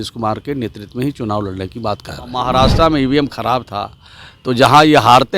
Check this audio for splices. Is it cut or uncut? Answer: cut